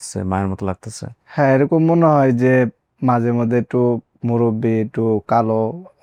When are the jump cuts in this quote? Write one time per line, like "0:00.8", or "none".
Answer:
none